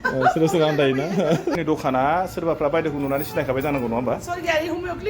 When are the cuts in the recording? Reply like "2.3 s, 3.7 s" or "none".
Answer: 1.5 s